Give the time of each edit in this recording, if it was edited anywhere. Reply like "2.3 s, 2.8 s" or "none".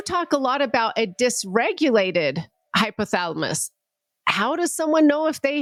none